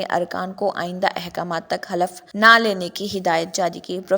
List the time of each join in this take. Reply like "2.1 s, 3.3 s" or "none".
2.2 s